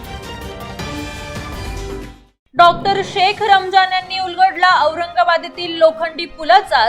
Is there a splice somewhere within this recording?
no; 0 cuts

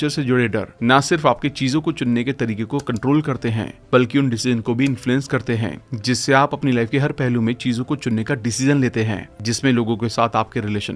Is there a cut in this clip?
no; 0 cuts

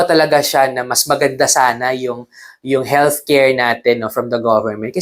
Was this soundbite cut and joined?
no; 0 cuts

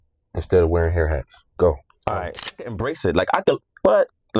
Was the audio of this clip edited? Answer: yes; 1 cut; at 2.5 s

